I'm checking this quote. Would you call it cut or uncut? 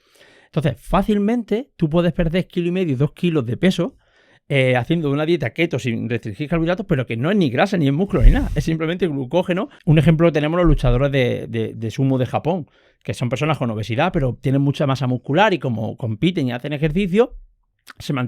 cut